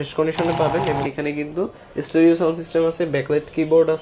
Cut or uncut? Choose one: cut